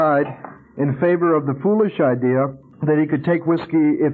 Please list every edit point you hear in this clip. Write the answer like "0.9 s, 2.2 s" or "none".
2.7 s